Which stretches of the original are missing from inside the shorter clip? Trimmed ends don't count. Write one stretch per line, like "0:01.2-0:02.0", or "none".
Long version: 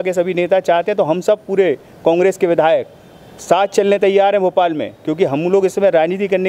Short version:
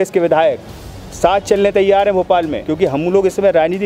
0:04.9-0:05.0